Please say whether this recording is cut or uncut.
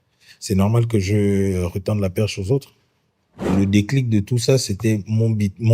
cut